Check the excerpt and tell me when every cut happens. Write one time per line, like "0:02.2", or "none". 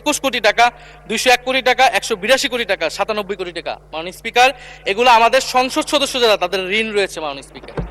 none